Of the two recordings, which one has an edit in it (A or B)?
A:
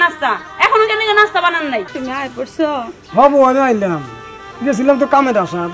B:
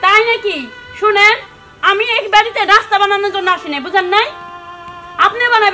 A